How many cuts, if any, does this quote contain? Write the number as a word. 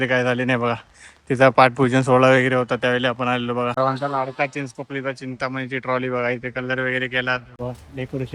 two